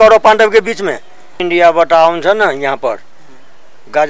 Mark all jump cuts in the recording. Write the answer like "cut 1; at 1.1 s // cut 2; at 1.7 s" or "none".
cut 1; at 1.4 s